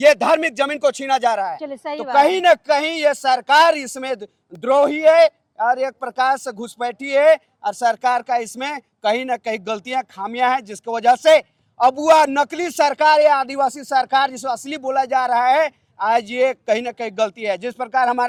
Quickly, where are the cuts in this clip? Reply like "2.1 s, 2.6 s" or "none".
none